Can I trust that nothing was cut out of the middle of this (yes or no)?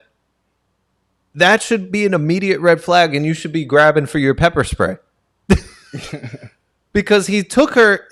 yes